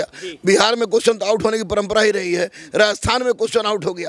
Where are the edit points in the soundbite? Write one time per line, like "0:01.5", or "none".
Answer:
none

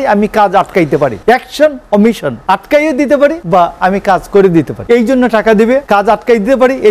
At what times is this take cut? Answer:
0:01.2
0:02.3
0:03.4
0:04.8
0:05.8

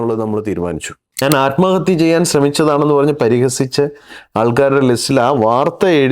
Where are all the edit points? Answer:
0:01.2

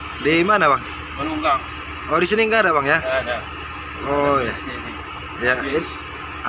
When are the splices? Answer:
none

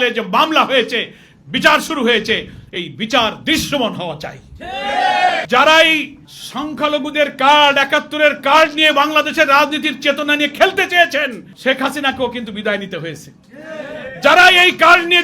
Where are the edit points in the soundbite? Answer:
0:05.4

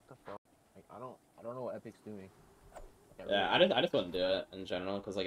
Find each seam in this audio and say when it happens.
none

